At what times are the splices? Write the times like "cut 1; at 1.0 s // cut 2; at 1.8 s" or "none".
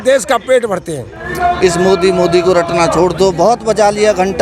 cut 1; at 1.2 s